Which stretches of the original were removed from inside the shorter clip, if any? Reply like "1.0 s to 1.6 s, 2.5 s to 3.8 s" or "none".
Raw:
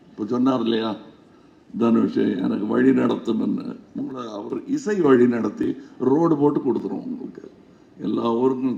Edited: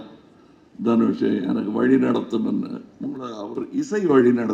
none